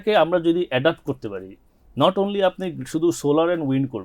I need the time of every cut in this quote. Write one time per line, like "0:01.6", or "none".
none

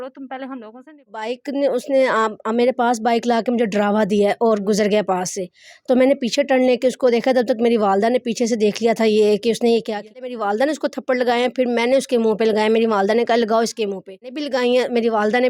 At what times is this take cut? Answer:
0:01.4
0:10.3
0:14.4

